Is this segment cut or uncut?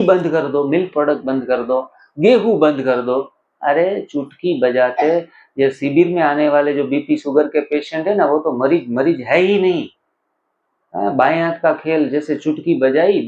uncut